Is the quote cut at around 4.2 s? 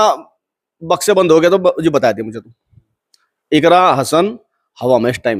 no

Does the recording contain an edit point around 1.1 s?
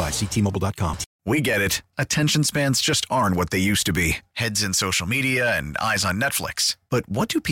yes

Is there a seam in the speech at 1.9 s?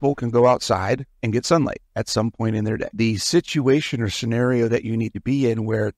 no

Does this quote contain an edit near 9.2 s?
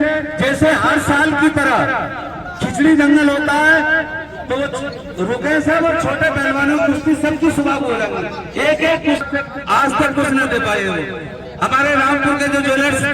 yes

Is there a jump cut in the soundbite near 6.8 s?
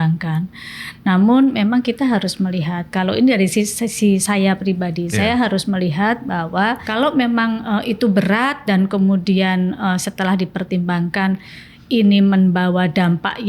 yes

